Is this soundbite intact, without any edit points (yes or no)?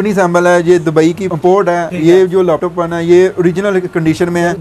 yes